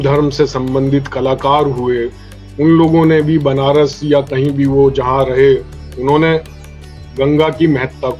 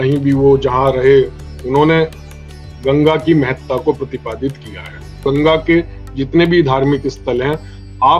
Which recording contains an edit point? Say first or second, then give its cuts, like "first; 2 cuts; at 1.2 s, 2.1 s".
second; 1 cut; at 5.2 s